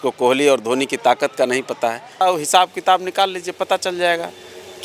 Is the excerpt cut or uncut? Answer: cut